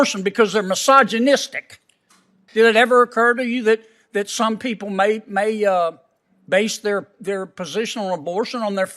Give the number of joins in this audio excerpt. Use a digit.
1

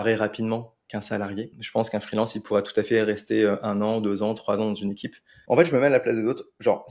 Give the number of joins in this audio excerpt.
2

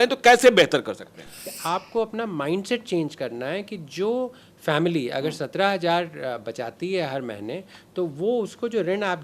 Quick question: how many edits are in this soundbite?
1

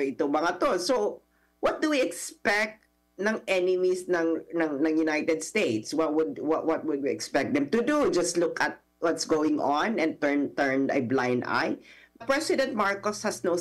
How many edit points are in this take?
1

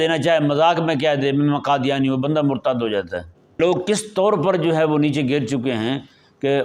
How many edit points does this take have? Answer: 1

